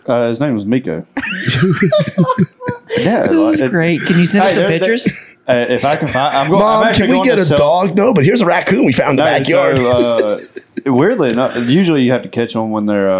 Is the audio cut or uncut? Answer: uncut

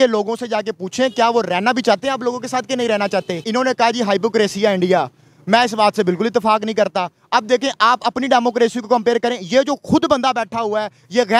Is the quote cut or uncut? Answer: cut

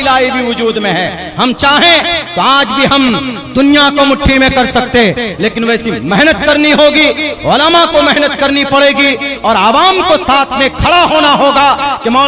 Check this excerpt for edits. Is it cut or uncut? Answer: uncut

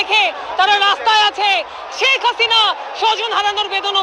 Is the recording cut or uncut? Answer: uncut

